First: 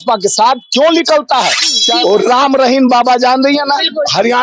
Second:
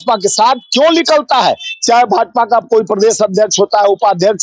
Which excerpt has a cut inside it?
first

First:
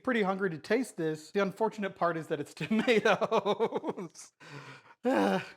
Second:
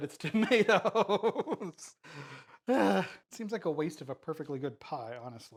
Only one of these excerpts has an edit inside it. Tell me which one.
first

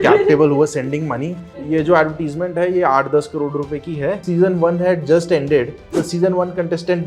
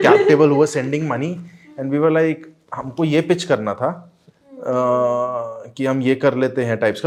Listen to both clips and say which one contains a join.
first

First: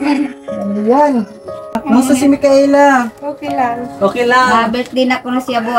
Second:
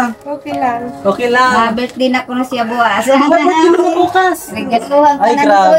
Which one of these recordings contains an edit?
first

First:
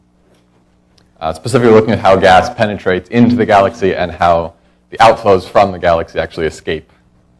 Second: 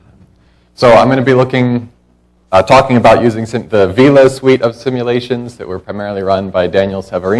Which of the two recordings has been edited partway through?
first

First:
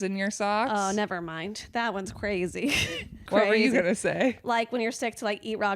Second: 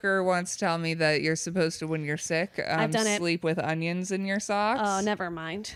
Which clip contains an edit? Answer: first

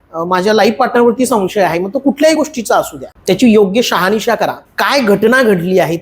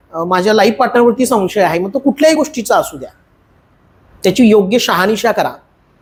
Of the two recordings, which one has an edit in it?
first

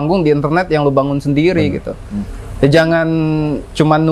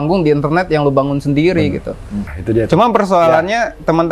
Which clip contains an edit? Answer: second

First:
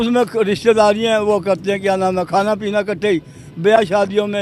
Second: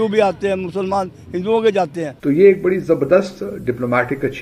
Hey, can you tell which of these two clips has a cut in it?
second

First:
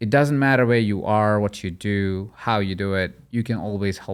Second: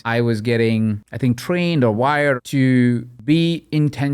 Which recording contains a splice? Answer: second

